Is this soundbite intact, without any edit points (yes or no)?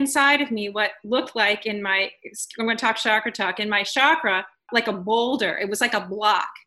yes